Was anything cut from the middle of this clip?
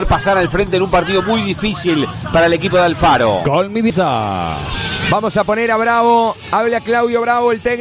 yes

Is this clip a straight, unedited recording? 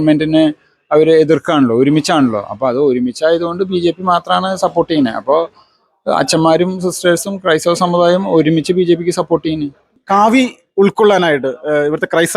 no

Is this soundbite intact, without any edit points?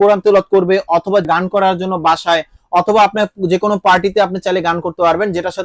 no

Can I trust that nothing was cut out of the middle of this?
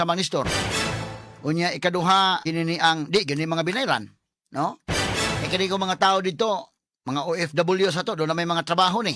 no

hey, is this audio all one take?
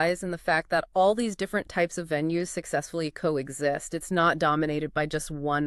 yes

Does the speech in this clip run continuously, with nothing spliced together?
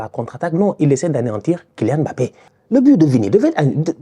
no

